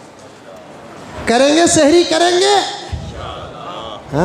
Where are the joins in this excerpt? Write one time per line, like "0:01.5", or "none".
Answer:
0:01.1